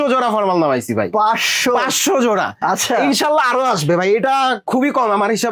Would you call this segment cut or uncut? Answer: uncut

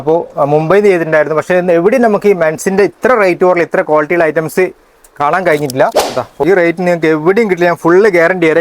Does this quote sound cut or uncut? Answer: cut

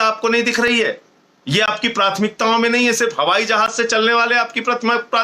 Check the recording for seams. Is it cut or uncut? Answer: uncut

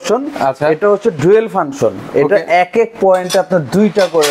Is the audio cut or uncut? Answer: uncut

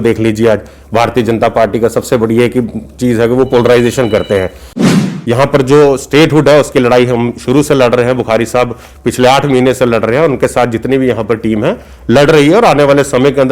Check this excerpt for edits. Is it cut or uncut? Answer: cut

